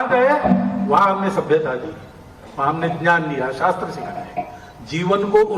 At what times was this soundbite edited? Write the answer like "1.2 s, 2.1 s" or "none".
3.6 s